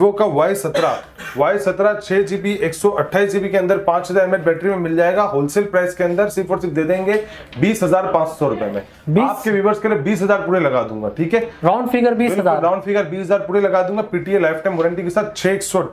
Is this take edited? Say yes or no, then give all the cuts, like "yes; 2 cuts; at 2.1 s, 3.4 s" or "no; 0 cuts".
no; 0 cuts